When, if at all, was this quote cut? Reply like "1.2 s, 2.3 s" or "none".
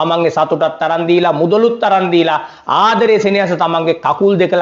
none